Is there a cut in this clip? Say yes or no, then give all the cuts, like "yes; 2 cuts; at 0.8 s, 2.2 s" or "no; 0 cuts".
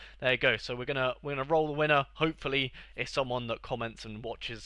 no; 0 cuts